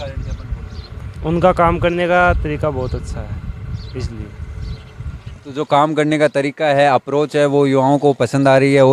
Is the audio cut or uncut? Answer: uncut